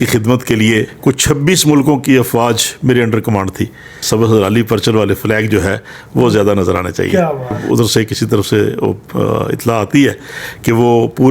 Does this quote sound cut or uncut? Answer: cut